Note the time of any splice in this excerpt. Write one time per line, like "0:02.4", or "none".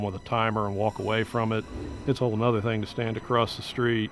none